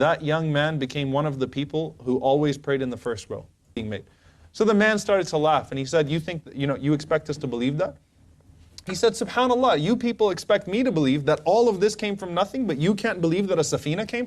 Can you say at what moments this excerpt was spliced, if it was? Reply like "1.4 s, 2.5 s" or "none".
3.8 s